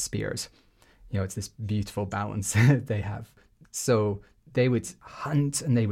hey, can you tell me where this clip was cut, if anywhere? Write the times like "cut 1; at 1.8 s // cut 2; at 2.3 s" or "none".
cut 1; at 3.4 s // cut 2; at 5.0 s